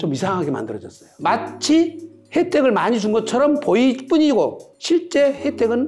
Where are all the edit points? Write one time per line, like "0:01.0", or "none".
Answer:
0:01.2